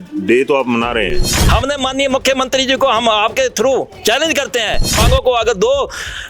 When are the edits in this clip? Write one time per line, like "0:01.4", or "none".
0:01.3
0:05.0